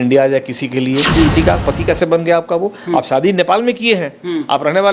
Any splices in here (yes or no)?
yes